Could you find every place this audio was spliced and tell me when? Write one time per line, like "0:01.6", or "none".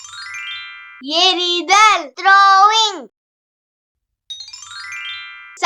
0:01.0

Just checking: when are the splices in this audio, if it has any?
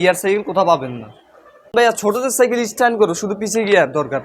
0:01.7

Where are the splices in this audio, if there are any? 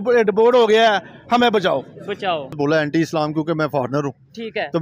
0:02.5

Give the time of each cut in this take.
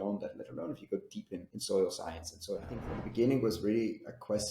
0:01.5
0:03.0

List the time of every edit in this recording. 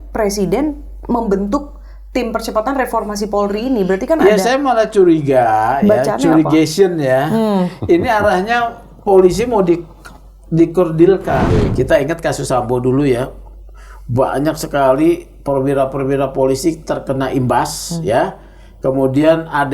0:11.7

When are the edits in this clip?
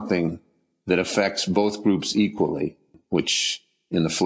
0:02.9

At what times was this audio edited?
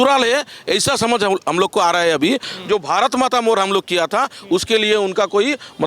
none

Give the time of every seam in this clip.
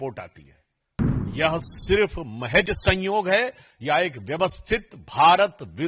0:01.0

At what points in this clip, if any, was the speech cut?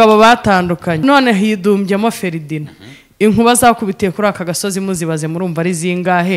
0:01.0

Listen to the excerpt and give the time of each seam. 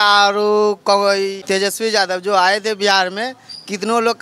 0:01.4

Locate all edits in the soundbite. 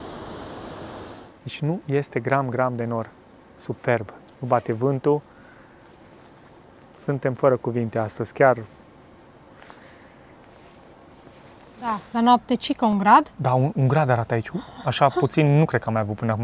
0:00.9
0:11.9

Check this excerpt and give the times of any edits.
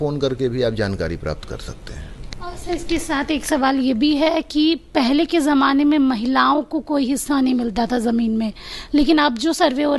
none

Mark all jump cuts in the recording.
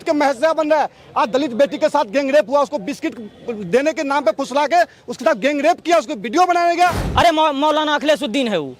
0:07.0

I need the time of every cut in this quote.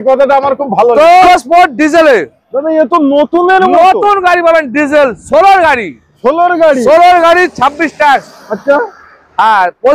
0:01.3

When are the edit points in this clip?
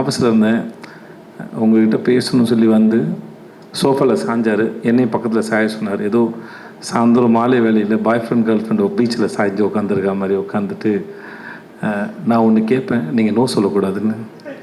none

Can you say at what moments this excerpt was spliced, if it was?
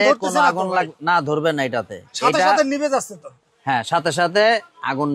none

